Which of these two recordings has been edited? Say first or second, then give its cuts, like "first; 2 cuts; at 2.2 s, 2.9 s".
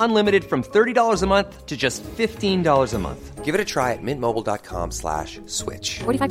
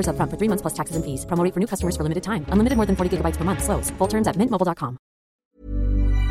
second; 1 cut; at 5.3 s